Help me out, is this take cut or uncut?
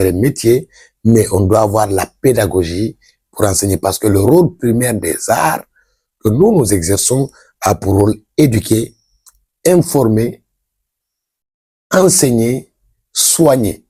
uncut